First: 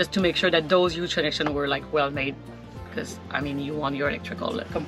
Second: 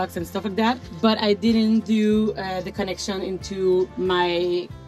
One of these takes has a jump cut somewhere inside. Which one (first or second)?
second